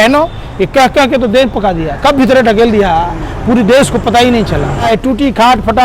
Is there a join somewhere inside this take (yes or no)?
yes